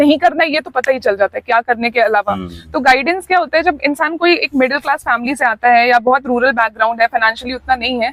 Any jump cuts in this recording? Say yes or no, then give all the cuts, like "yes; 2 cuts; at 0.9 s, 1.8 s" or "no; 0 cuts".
no; 0 cuts